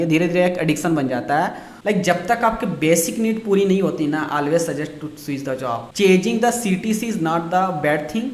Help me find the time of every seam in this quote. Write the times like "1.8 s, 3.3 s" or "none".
1.7 s